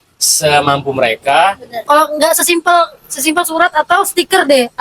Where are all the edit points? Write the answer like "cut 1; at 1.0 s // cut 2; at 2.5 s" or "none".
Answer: cut 1; at 1.8 s